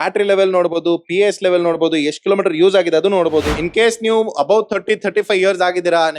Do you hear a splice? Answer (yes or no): yes